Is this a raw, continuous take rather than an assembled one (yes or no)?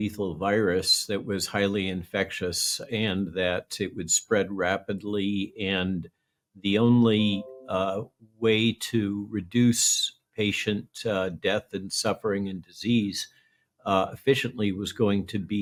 yes